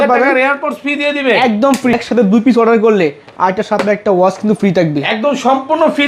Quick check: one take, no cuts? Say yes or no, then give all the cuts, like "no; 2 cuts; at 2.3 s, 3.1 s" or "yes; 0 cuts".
no; 1 cut; at 1.9 s